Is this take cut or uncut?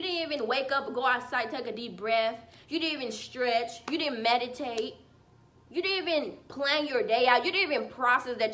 uncut